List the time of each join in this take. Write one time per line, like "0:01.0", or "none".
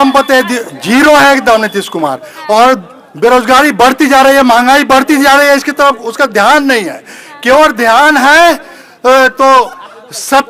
none